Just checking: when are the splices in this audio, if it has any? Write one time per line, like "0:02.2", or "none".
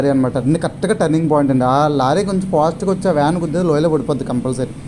none